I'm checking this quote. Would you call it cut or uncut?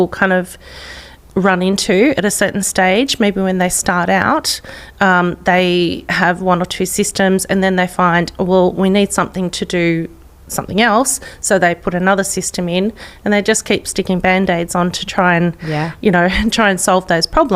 uncut